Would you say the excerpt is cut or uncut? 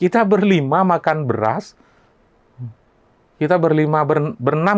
uncut